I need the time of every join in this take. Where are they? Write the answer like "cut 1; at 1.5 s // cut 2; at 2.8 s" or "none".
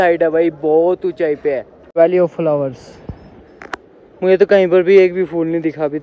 cut 1; at 1.8 s